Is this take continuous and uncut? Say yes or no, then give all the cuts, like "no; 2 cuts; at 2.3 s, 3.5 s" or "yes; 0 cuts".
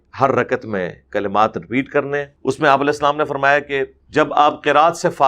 no; 2 cuts; at 2.3 s, 4.0 s